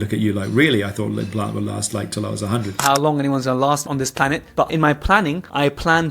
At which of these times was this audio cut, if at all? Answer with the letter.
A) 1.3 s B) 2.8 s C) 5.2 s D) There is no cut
B